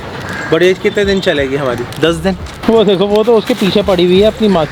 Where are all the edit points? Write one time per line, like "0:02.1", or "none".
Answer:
0:02.5